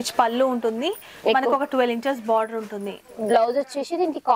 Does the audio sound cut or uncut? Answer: uncut